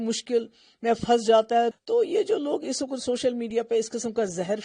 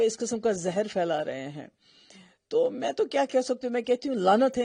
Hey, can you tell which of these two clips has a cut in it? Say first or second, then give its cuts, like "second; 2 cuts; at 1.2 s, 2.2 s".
first; 1 cut; at 1.8 s